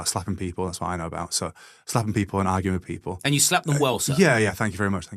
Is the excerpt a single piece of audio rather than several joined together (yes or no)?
yes